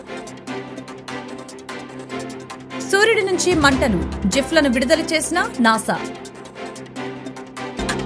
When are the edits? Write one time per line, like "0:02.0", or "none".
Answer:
none